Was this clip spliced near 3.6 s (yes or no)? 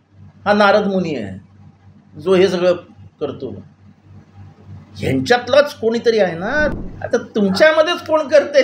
no